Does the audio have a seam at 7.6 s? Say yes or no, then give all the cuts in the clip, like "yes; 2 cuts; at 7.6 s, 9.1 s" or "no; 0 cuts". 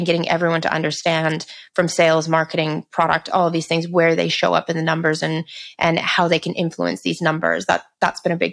no; 0 cuts